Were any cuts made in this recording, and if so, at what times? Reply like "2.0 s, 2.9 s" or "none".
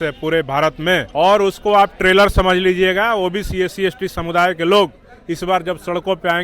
1.1 s